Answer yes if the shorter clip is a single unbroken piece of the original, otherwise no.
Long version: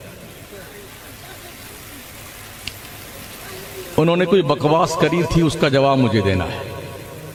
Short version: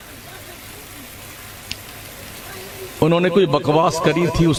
yes